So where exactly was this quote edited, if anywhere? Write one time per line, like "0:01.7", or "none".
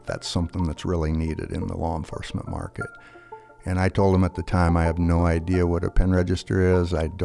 none